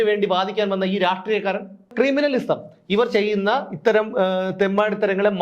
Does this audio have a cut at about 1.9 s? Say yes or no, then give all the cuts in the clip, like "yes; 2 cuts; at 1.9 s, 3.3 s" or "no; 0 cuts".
yes; 1 cut; at 1.9 s